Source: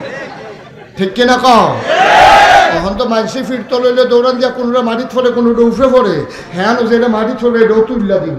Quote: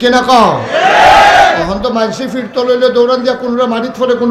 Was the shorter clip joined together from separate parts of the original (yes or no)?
no